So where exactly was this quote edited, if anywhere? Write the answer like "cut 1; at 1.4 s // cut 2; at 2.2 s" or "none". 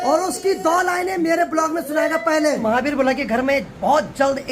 cut 1; at 2.6 s

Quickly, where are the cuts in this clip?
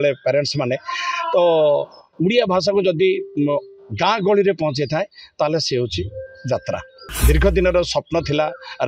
cut 1; at 7.1 s

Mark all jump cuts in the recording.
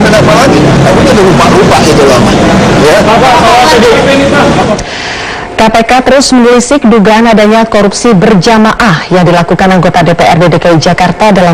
none

